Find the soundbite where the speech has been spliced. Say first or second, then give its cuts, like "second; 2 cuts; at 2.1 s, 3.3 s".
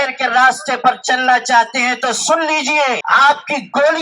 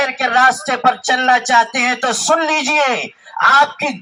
first; 1 cut; at 3.0 s